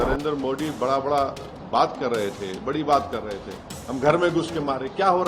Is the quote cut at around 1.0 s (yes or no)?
no